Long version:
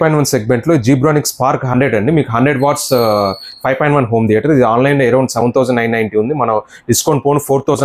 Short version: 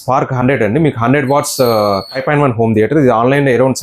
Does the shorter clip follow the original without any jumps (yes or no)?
no